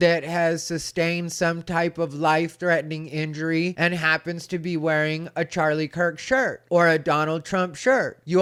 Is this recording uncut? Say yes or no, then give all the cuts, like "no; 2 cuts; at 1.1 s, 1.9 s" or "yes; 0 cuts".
yes; 0 cuts